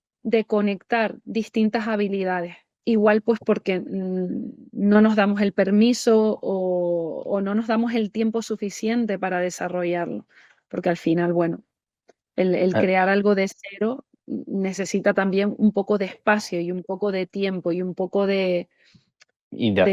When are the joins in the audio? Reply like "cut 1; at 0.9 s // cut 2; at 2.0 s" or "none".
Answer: none